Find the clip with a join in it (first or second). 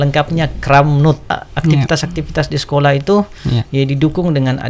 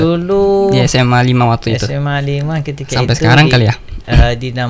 first